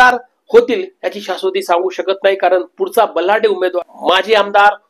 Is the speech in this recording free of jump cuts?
no; 1 cut; at 3.7 s

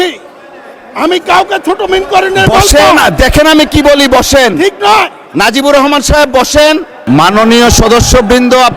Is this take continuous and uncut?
no; 1 cut; at 7.0 s

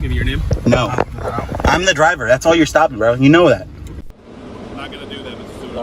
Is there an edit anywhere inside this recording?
yes; 1 cut; at 4.0 s

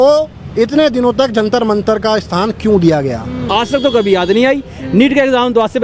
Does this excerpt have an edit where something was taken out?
yes; 1 cut; at 3.4 s

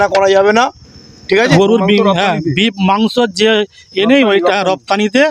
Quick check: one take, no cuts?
no; 1 cut; at 1.5 s

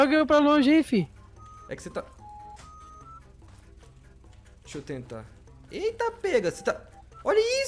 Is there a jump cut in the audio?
no; 0 cuts

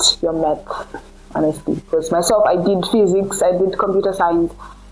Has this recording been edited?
no; 0 cuts

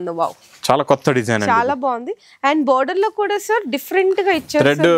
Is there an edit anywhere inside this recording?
no; 0 cuts

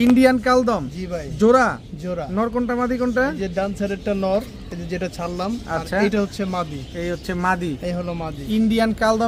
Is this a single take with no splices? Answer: yes; 0 cuts

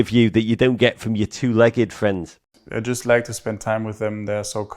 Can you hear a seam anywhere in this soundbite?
yes; 1 cut; at 2.4 s

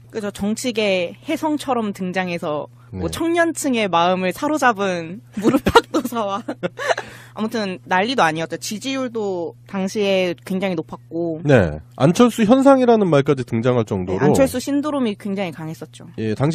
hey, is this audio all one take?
yes; 0 cuts

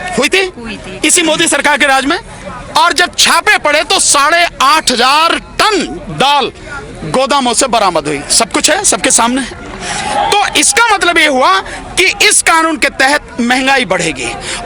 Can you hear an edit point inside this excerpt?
no; 0 cuts

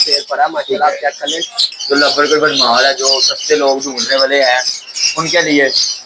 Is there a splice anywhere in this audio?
yes; 1 cut; at 1.5 s

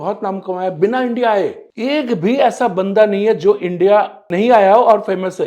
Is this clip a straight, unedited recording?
yes; 0 cuts

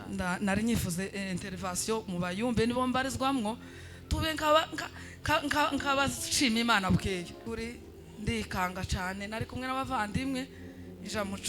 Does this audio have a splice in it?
yes; 1 cut; at 7.4 s

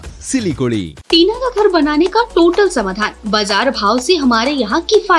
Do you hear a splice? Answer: yes; 1 cut; at 0.9 s

